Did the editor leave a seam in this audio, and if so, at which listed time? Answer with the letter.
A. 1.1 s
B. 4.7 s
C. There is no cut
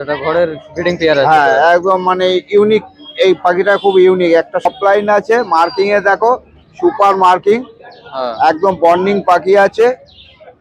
B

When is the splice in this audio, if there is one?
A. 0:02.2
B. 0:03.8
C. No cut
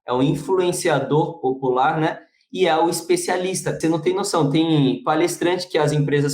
B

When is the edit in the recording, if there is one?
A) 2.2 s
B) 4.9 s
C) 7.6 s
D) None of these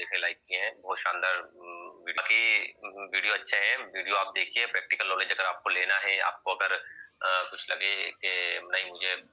A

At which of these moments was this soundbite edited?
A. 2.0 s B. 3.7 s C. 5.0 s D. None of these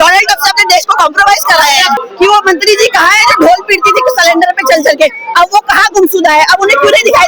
A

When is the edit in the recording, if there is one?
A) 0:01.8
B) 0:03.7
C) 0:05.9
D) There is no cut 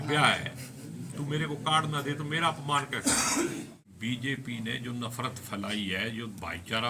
B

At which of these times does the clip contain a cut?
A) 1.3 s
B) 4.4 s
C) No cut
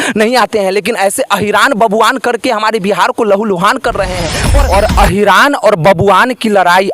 B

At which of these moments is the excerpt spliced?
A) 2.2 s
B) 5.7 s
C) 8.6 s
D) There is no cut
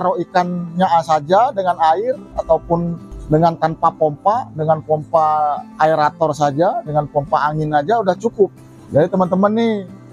C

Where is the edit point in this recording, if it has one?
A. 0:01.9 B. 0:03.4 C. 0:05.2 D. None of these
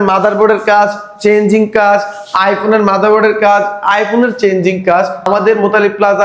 C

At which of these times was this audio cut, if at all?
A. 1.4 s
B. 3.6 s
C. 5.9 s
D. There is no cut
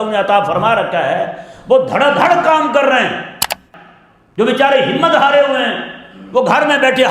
B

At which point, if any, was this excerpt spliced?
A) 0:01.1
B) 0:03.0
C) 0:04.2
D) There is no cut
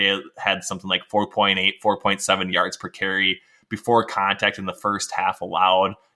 D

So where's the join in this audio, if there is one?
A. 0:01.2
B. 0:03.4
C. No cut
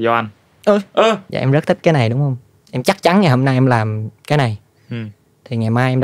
A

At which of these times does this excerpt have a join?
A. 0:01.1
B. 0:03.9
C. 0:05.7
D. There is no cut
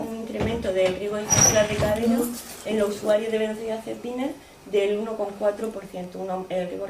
C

